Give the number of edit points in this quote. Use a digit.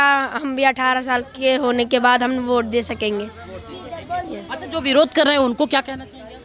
0